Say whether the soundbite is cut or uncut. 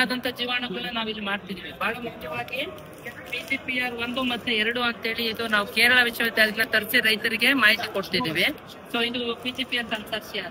uncut